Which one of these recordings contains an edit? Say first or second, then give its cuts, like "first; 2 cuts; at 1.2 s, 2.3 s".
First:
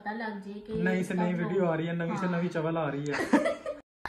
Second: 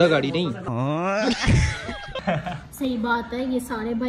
second; 1 cut; at 2.2 s